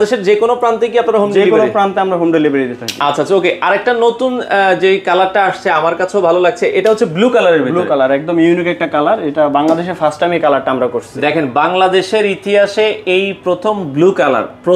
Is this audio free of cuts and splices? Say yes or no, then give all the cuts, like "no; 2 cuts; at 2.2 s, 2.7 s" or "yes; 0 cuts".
yes; 0 cuts